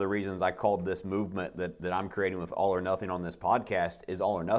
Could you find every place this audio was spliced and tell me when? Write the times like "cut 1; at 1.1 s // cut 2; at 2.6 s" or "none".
none

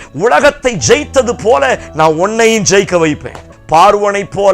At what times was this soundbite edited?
cut 1; at 3.5 s

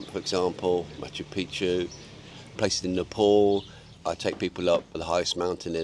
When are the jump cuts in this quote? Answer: cut 1; at 2.6 s // cut 2; at 3.8 s // cut 3; at 5.0 s

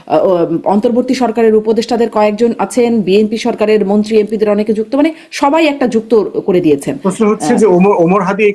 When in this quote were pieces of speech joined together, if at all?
none

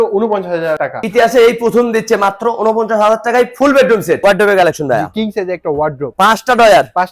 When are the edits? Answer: cut 1; at 1.0 s // cut 2; at 4.1 s

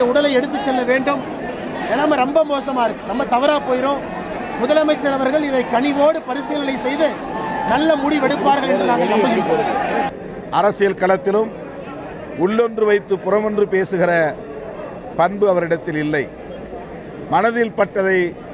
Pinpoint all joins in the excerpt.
cut 1; at 10.1 s

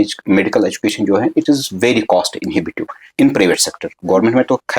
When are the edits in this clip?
none

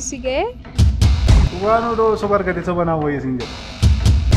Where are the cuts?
none

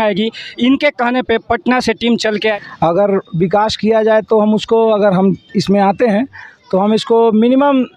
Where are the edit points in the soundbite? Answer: cut 1; at 2.6 s

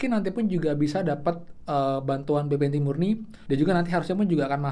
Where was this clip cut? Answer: cut 1; at 3.3 s

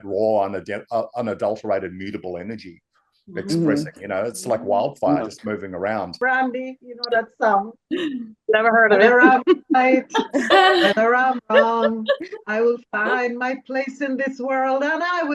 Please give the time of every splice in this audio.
cut 1; at 6.1 s

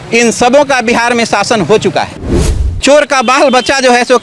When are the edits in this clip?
cut 1; at 2.4 s

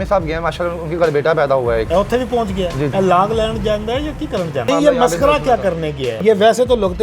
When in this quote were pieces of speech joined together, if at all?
cut 1; at 1.9 s // cut 2; at 2.9 s // cut 3; at 4.7 s // cut 4; at 6.2 s

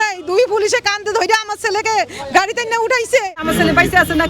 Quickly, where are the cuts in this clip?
cut 1; at 3.4 s

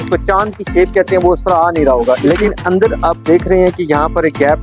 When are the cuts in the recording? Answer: cut 1; at 2.2 s

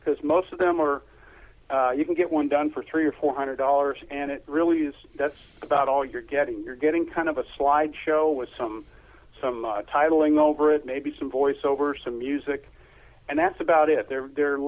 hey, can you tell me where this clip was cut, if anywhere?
none

